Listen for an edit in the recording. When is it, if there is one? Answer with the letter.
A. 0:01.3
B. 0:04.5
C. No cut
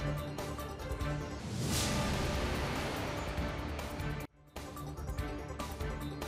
A